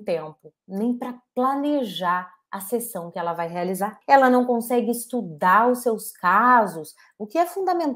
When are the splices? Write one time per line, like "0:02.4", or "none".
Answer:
0:04.0